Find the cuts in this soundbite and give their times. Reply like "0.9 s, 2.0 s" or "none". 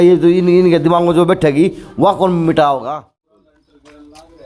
2.9 s